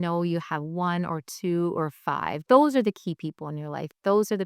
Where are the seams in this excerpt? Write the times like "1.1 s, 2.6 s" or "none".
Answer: 2.4 s